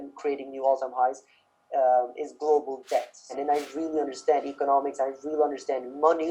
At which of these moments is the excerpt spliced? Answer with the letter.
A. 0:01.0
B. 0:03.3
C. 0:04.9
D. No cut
B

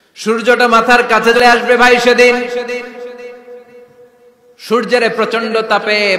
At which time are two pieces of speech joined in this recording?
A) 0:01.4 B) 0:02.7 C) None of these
A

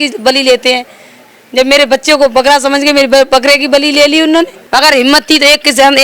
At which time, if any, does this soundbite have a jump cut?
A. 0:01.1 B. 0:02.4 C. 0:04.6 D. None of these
C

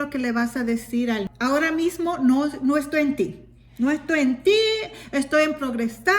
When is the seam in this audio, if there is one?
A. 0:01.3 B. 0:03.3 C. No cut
A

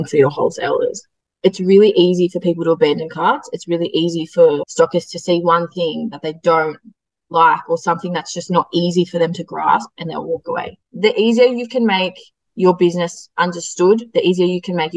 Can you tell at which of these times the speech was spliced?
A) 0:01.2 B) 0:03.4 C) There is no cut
A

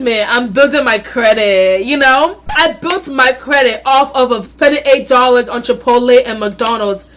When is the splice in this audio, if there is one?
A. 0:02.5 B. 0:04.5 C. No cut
A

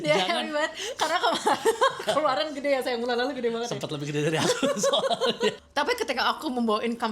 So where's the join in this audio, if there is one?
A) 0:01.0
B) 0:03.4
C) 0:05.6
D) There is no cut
C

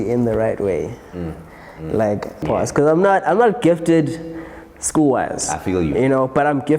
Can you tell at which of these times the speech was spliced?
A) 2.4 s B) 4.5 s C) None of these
A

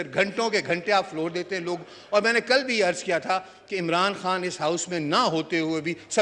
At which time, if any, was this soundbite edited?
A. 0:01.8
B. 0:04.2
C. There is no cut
C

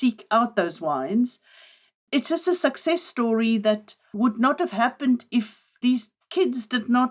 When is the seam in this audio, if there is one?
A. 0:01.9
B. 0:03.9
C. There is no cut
A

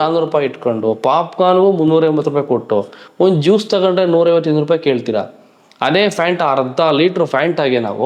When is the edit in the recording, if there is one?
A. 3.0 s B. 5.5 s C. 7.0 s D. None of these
D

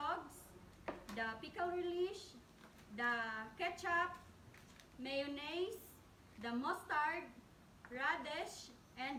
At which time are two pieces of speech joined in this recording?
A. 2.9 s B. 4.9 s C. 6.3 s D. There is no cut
D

